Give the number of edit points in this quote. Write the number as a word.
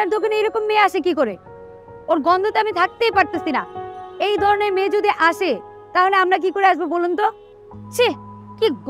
zero